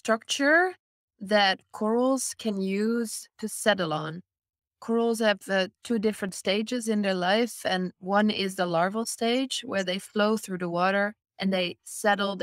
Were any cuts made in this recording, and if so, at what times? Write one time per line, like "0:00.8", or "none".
none